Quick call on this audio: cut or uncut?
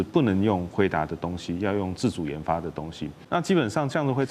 cut